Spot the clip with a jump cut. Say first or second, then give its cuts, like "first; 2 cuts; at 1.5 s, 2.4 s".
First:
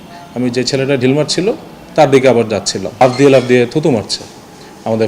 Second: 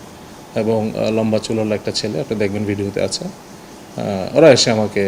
first; 1 cut; at 3.0 s